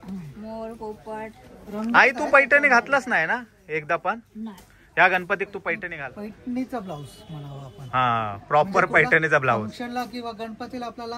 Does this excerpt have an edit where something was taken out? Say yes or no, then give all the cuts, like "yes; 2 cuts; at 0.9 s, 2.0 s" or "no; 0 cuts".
no; 0 cuts